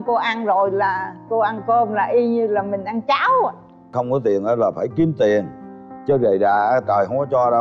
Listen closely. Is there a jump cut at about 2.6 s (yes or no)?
no